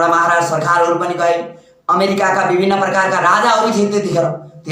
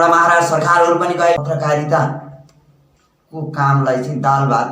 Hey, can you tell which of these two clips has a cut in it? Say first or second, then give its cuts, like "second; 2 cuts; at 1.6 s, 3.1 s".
second; 1 cut; at 1.4 s